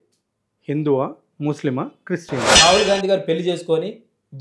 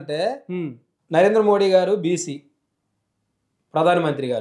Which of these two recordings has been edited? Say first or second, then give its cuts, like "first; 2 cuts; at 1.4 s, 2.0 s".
first; 1 cut; at 2.5 s